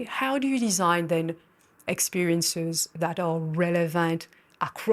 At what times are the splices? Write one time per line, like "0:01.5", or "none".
none